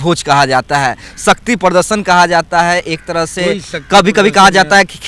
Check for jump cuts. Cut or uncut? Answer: uncut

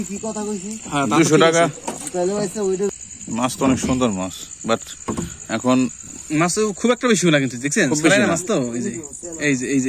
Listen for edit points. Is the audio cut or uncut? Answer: cut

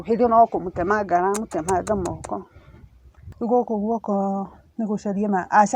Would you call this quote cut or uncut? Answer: cut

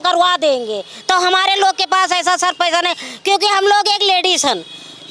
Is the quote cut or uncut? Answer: uncut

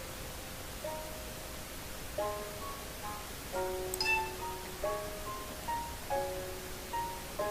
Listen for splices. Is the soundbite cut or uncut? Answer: cut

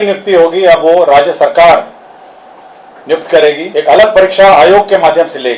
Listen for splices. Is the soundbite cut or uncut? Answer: cut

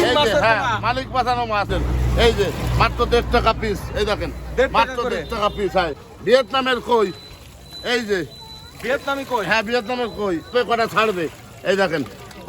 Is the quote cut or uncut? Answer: cut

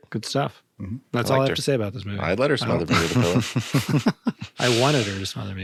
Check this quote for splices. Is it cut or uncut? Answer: uncut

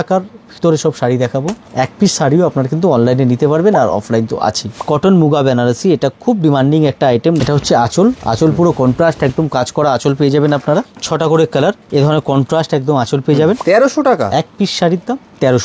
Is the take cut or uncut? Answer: cut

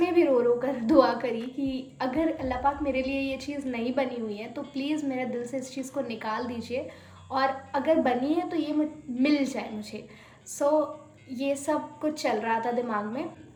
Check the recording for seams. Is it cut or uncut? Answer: uncut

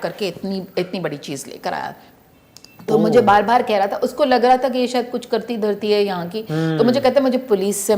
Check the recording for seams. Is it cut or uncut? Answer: uncut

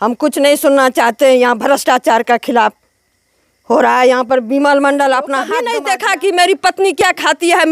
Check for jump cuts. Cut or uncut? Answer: cut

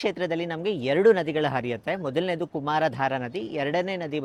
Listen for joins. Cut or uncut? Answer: uncut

